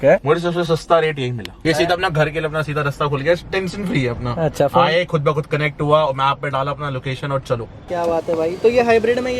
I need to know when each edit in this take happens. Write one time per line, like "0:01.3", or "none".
0:01.6
0:07.8